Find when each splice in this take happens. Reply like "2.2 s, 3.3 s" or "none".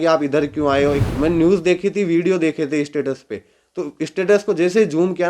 1.0 s